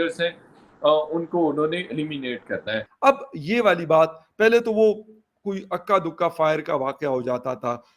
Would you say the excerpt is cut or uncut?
cut